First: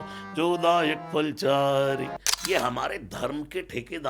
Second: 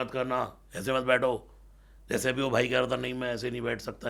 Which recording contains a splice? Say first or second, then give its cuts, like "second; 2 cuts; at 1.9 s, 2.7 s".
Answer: first; 1 cut; at 2.2 s